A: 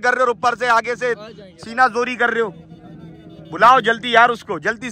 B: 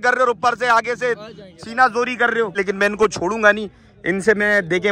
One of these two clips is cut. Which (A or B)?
B